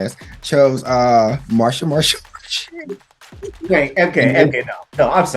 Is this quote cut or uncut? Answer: cut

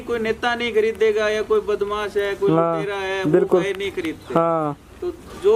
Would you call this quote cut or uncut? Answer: uncut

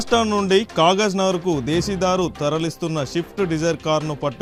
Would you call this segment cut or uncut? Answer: uncut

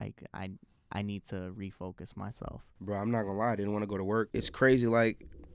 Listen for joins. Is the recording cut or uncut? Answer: cut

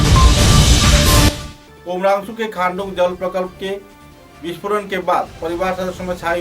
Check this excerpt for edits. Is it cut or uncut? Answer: cut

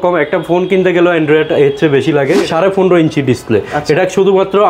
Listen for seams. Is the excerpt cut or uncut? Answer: cut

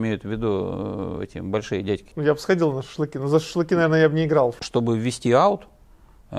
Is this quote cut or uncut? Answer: cut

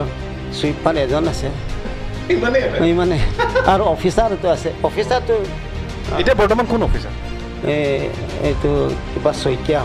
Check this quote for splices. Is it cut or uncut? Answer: uncut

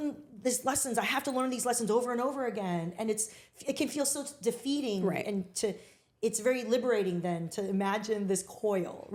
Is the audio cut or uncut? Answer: uncut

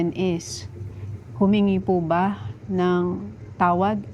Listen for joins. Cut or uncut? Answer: uncut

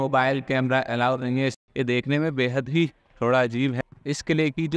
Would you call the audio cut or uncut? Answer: cut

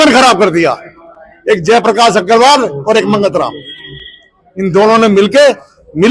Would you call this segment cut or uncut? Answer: uncut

